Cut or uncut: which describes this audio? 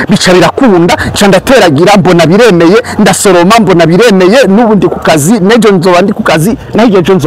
uncut